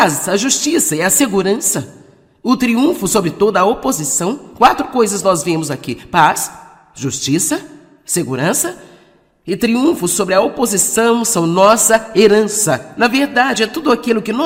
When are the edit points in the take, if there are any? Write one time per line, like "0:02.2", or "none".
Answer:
none

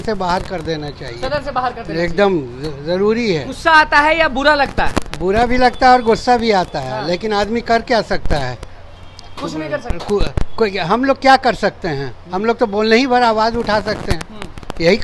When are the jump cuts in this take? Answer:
none

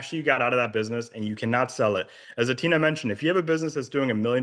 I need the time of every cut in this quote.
none

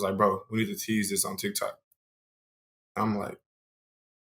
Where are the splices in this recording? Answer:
none

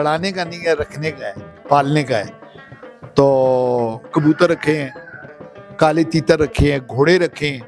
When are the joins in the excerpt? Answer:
none

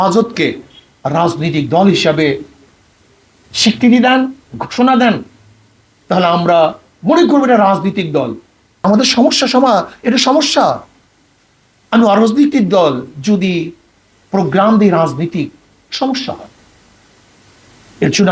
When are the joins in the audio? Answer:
0:08.8

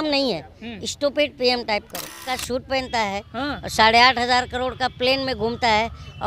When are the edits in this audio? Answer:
0:02.2

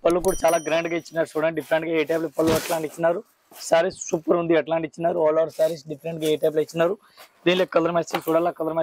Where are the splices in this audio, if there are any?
none

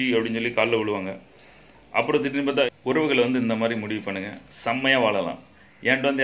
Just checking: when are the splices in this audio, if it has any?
0:02.7

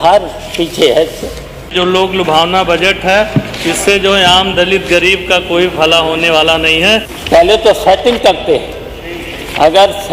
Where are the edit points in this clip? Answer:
0:01.7
0:07.1

